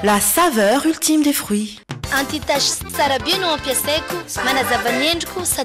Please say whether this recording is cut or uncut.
cut